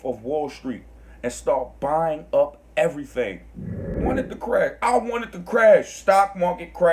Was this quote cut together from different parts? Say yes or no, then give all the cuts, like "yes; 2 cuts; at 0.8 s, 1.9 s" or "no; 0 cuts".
yes; 1 cut; at 4.1 s